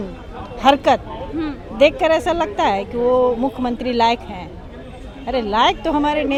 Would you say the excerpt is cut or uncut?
uncut